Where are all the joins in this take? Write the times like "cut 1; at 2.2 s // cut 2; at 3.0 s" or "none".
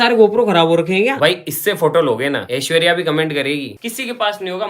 cut 1; at 1.1 s // cut 2; at 2.5 s // cut 3; at 3.8 s

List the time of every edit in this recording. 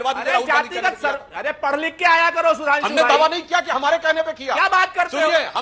none

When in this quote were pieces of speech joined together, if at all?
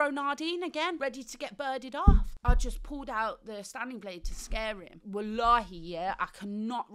cut 1; at 1.0 s // cut 2; at 2.3 s // cut 3; at 4.9 s

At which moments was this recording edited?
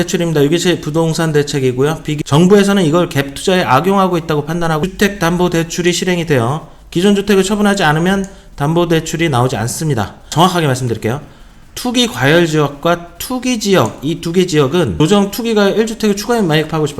cut 1; at 2.2 s // cut 2; at 4.8 s // cut 3; at 10.3 s // cut 4; at 14.9 s

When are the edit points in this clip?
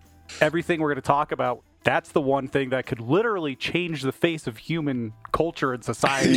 cut 1; at 1.7 s

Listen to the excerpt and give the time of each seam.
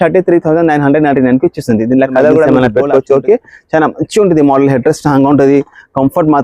cut 1; at 2.5 s

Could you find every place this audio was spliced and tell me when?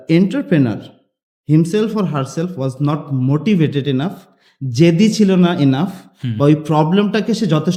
none

